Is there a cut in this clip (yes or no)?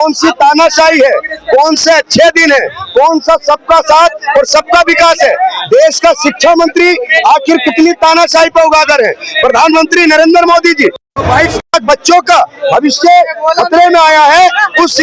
no